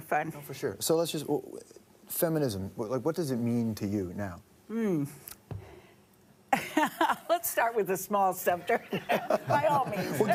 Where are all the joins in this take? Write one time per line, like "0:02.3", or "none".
none